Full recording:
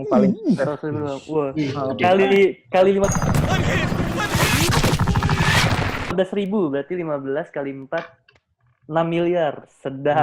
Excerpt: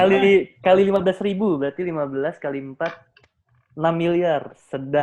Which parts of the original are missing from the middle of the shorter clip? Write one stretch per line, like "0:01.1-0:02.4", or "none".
0:03.1-0:06.1